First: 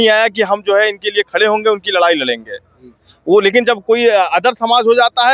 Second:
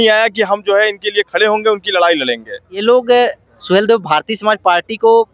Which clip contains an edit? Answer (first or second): second